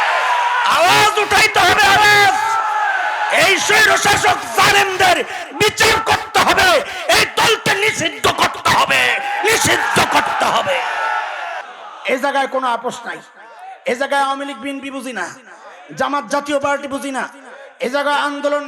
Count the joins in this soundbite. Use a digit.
1